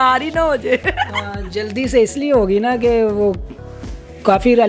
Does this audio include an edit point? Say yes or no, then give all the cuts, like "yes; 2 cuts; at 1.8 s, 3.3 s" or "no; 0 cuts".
no; 0 cuts